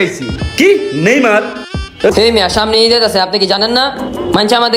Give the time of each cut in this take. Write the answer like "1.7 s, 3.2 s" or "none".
2.1 s